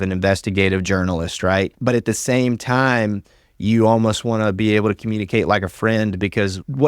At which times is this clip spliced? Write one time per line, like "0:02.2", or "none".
0:01.7